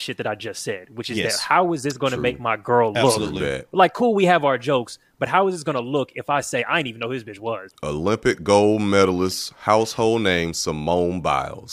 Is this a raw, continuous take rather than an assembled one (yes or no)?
yes